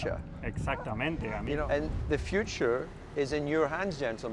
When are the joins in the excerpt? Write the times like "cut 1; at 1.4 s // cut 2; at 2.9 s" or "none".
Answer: cut 1; at 1.6 s